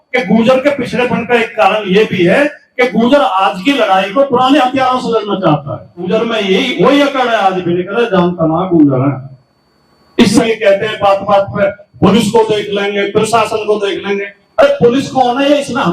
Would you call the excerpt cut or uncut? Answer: cut